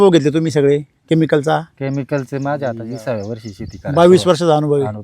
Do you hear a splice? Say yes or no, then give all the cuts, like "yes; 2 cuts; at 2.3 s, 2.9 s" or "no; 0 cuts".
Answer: yes; 1 cut; at 2.8 s